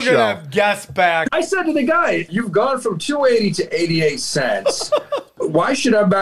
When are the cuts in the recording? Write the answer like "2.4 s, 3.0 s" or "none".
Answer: 1.2 s, 2.3 s, 5.4 s